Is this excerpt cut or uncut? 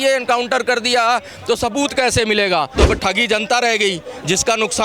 cut